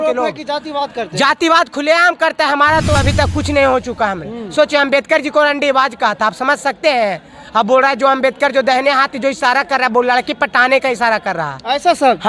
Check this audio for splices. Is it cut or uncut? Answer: cut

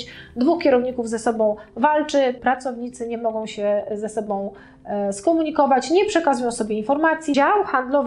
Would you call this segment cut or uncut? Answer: cut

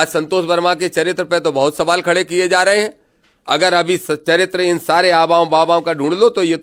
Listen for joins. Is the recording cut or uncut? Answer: uncut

